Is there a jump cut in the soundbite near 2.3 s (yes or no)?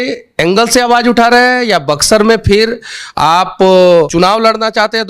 no